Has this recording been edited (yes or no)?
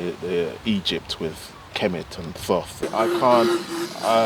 yes